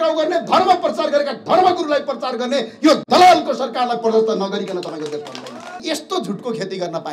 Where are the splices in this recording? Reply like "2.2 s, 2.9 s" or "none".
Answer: 5.8 s